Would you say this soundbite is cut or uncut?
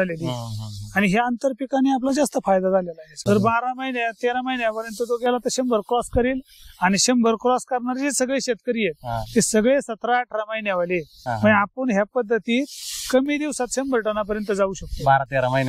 cut